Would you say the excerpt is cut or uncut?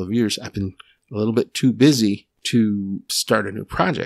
cut